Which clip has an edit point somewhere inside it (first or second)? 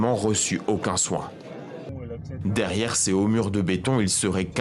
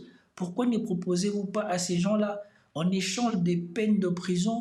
first